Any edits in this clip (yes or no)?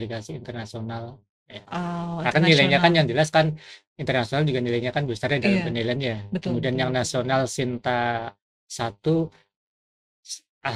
no